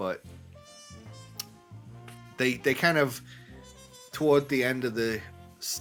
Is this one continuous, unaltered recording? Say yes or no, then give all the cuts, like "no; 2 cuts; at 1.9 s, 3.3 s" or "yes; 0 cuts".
yes; 0 cuts